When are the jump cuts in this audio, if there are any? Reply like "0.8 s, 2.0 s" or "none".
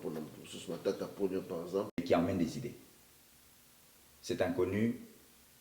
2.0 s